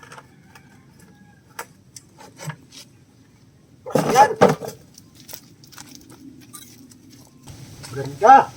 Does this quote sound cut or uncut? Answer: uncut